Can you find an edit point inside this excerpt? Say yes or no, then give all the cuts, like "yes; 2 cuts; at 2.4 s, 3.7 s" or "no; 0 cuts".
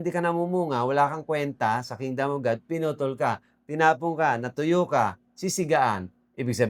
no; 0 cuts